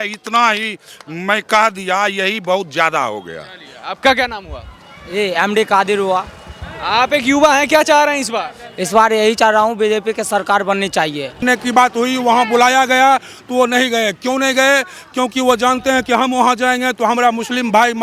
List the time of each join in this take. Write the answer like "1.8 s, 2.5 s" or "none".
11.4 s

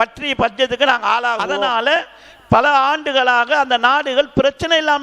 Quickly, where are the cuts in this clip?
2.1 s

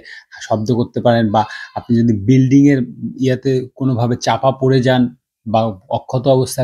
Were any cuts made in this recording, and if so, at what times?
none

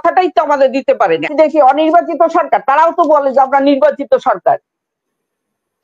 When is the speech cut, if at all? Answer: 1.3 s

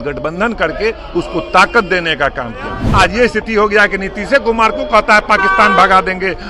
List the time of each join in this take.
2.8 s

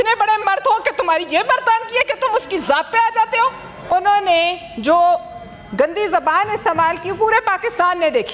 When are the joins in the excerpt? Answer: 3.9 s

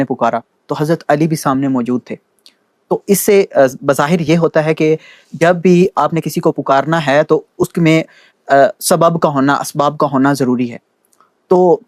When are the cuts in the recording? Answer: none

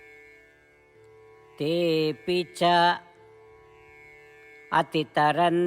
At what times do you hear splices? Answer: 0.9 s

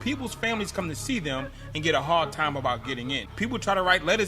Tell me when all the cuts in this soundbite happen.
3.2 s

